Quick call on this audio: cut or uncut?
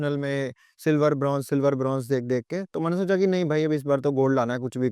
uncut